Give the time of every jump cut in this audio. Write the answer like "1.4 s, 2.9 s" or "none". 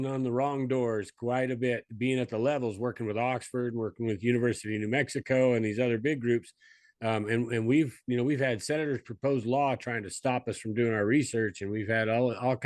none